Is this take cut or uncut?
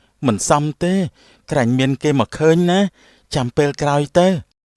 uncut